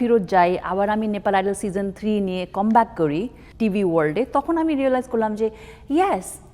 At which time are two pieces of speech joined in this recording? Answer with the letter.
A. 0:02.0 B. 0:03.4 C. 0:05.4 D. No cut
B